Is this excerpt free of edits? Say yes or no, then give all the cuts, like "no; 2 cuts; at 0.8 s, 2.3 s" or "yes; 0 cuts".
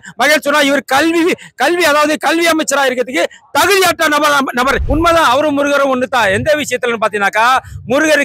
no; 1 cut; at 4.8 s